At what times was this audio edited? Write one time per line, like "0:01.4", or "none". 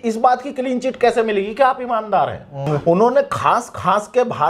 0:02.6